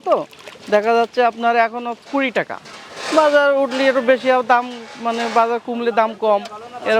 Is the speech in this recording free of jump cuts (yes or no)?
yes